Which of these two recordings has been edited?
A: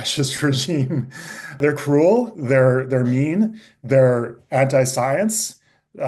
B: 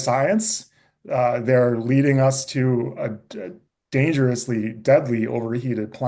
A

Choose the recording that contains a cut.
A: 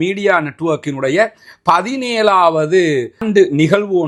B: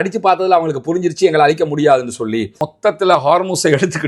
B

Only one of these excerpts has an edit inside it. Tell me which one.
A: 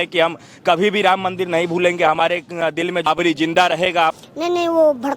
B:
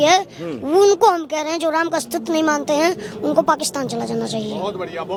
A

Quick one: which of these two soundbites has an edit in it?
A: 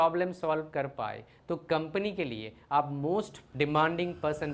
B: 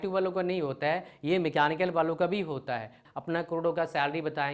B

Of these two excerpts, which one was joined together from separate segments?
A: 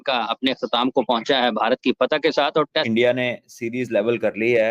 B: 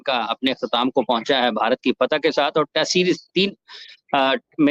A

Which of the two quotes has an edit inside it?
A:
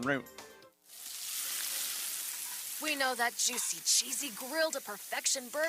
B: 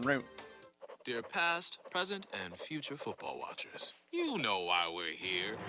B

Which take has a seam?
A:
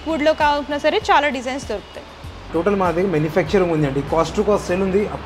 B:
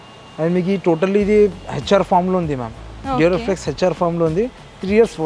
A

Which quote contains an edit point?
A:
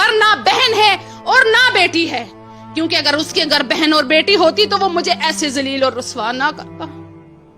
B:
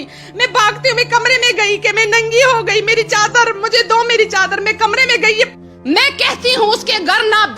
B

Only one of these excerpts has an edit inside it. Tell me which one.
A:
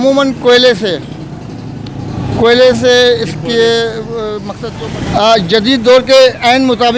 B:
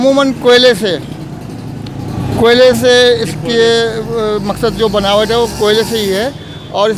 A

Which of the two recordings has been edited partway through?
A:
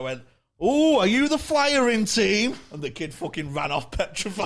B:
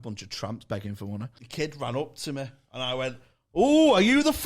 B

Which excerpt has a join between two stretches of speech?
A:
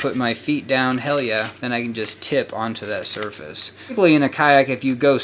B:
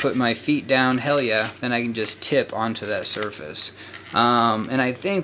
A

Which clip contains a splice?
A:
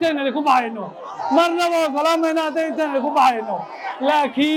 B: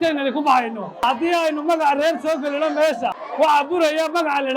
B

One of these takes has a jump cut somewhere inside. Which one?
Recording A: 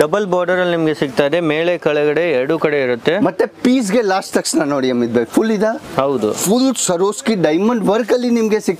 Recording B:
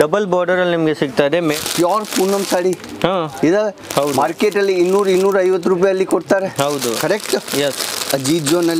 B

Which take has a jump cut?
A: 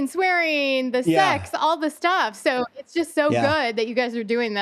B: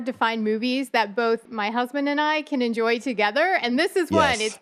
B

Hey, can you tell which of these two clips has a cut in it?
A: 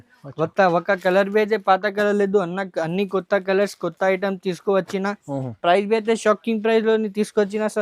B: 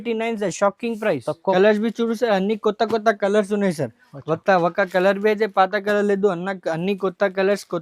B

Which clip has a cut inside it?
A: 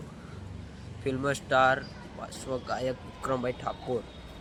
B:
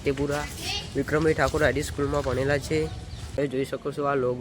B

